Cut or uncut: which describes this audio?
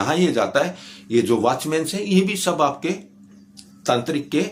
uncut